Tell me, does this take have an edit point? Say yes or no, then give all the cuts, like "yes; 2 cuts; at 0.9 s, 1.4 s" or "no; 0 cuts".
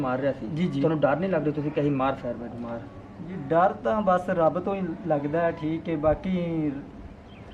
no; 0 cuts